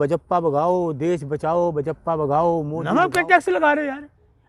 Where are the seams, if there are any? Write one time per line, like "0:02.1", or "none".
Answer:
0:02.8